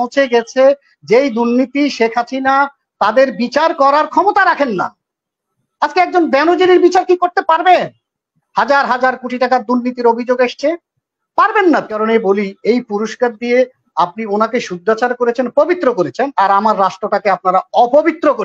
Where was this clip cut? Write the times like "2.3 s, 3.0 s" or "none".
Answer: 12.0 s